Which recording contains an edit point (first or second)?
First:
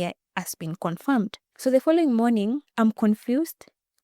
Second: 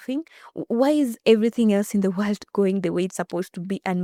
first